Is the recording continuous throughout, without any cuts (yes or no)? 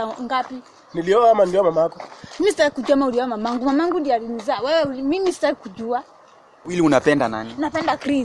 no